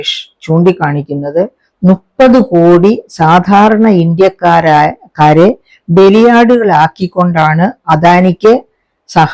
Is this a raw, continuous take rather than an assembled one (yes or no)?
yes